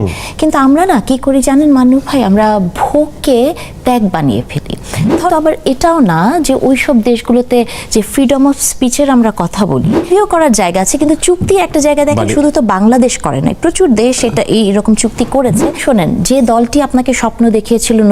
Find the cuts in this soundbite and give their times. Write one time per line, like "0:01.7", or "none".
0:05.3
0:10.1
0:15.8